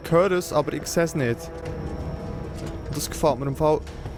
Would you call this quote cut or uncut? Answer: uncut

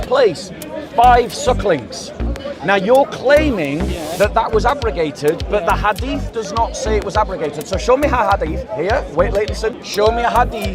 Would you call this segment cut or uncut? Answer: cut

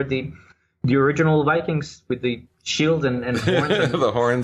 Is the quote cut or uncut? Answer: uncut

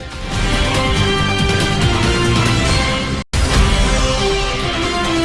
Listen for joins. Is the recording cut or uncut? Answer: uncut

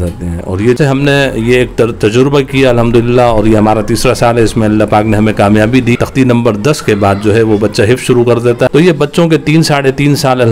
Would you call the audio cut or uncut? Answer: cut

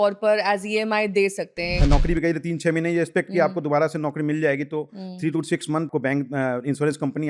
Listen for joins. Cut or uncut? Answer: cut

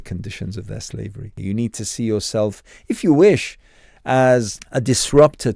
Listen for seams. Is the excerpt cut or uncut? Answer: cut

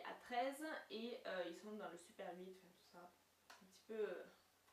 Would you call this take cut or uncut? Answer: uncut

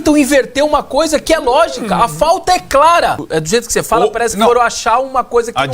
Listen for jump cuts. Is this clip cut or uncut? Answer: cut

